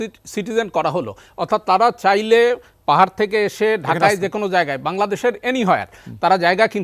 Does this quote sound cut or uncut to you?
uncut